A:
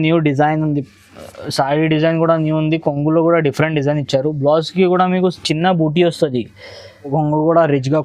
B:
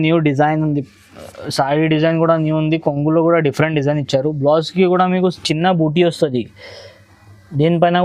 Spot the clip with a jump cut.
A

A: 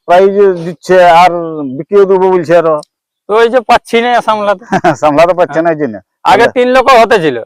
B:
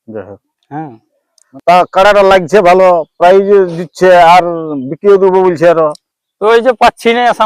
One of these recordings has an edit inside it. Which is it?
B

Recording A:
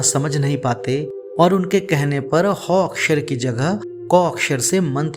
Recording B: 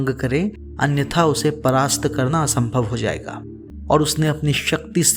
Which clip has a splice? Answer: B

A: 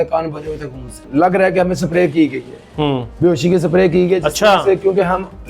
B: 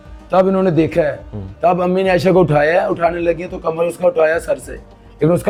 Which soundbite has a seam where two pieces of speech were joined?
A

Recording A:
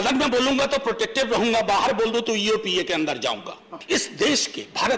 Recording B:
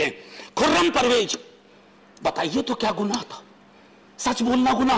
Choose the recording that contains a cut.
A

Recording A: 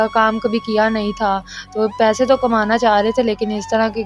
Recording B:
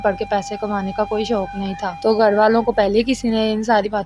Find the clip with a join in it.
B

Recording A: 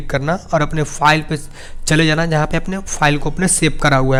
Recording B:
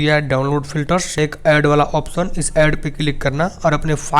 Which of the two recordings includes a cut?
B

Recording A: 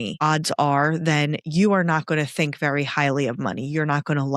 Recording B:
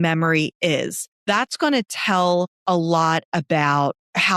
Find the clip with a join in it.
B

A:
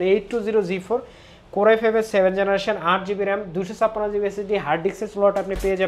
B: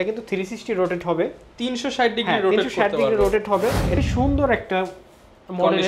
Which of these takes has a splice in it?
B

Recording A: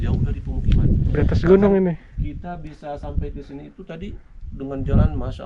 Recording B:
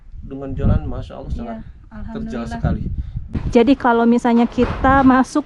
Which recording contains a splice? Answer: B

